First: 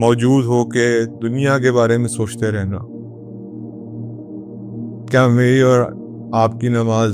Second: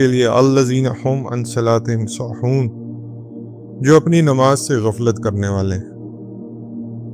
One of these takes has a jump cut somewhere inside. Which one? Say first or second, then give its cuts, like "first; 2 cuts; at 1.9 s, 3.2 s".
second; 1 cut; at 5.8 s